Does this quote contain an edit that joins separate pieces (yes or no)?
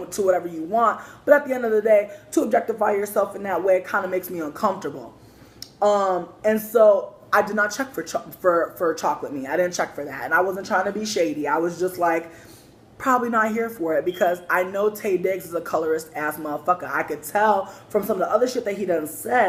no